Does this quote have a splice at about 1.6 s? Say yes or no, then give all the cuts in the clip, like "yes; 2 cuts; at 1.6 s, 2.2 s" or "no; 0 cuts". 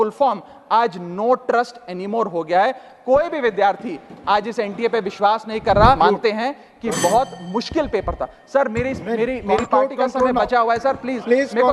no; 1 cut; at 6.0 s